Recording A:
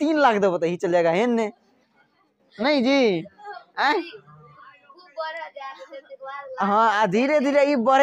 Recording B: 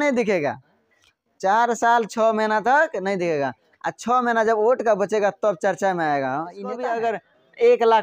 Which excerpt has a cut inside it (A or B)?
B